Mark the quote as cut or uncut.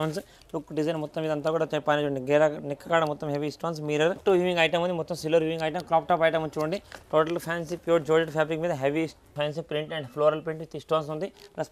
cut